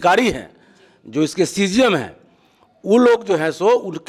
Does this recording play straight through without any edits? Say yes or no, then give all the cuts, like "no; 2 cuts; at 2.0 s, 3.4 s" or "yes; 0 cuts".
yes; 0 cuts